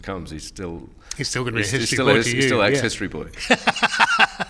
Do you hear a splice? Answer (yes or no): no